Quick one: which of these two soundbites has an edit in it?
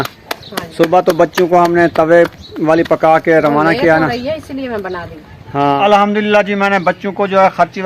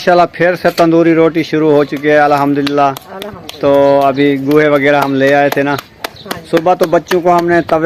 first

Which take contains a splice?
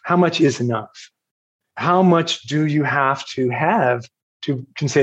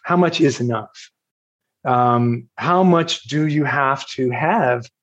first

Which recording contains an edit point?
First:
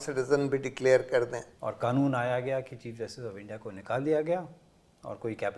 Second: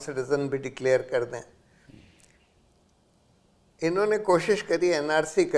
first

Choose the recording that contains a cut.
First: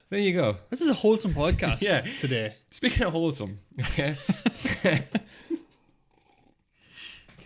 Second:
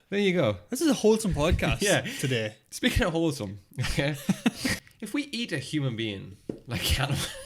second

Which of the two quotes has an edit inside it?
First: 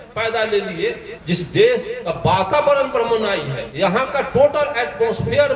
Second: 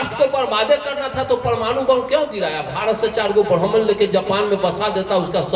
first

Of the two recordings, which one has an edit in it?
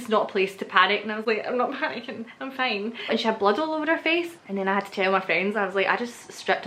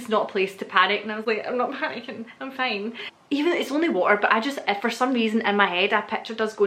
first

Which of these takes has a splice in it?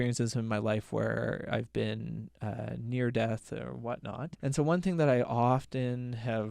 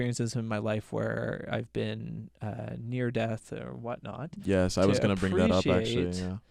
first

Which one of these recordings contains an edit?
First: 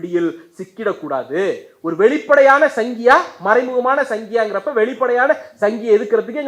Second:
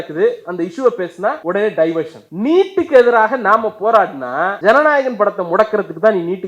second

